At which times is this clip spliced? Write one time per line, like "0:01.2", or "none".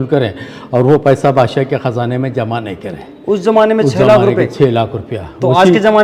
none